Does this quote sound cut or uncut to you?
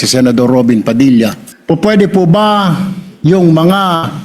cut